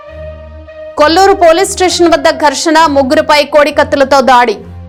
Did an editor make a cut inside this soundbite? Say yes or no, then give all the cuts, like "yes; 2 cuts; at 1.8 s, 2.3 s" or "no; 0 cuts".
no; 0 cuts